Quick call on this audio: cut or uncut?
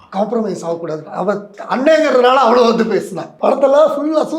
cut